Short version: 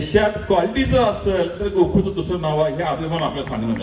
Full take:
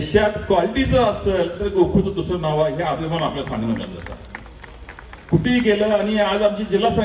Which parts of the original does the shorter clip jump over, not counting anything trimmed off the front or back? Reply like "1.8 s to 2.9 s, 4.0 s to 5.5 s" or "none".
none